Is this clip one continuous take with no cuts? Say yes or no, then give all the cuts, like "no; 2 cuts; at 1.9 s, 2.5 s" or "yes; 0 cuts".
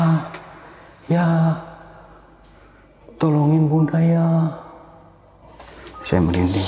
yes; 0 cuts